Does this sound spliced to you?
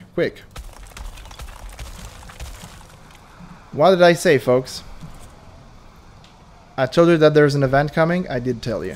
no; 0 cuts

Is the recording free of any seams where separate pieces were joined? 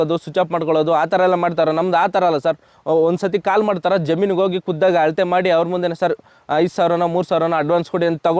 yes; 0 cuts

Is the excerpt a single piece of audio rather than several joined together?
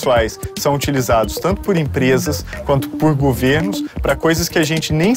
yes; 0 cuts

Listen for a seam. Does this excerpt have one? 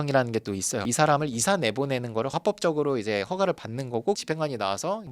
yes; 2 cuts; at 0.8 s, 4.2 s

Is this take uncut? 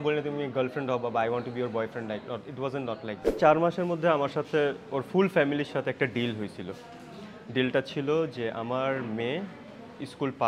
no; 1 cut; at 3.4 s

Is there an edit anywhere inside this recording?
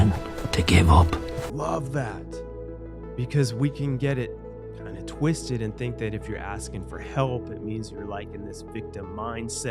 yes; 1 cut; at 1.5 s

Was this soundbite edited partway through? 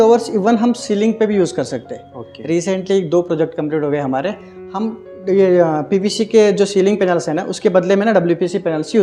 no; 0 cuts

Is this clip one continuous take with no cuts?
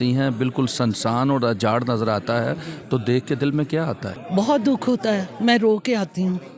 yes; 0 cuts

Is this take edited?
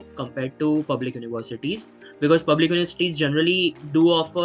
no; 0 cuts

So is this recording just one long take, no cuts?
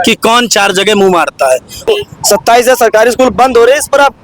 no; 1 cut; at 1.9 s

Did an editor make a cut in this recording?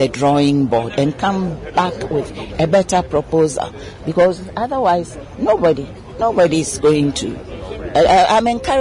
no; 0 cuts

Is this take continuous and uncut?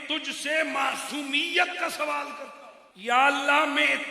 no; 1 cut; at 2.6 s

